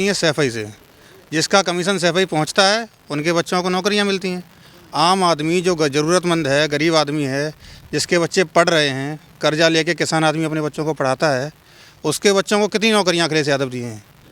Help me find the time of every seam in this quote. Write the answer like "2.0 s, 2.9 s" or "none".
none